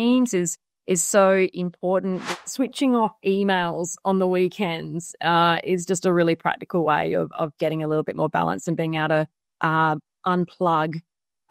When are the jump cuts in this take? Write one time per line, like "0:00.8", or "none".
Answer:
0:02.2

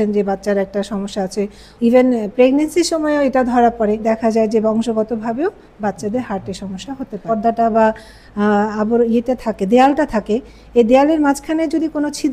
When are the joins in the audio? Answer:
0:01.7
0:04.0
0:07.3

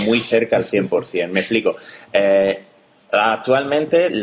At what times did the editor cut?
none

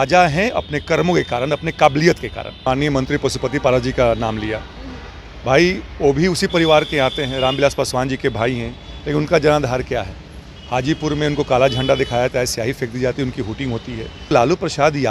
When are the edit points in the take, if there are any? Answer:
0:02.6
0:14.3

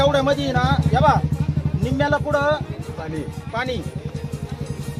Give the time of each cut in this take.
none

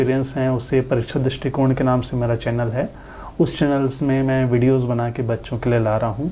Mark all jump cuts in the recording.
none

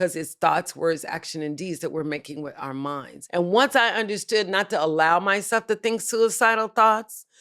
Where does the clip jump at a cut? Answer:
0:03.1

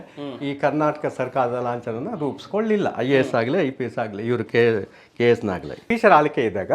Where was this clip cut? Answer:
0:05.8

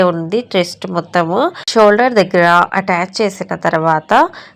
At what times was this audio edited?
0:01.6

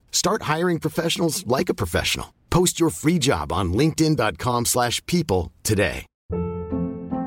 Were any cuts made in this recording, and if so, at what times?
0:06.1

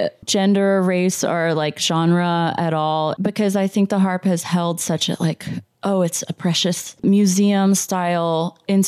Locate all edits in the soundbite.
none

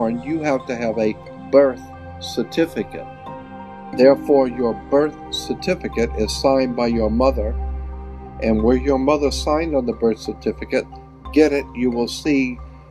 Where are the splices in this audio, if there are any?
0:03.5

